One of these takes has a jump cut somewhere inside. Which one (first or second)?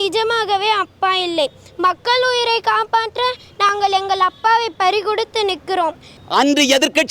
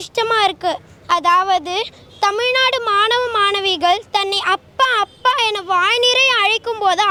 first